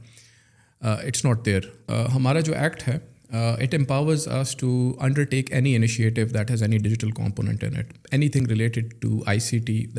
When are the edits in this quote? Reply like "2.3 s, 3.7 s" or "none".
1.8 s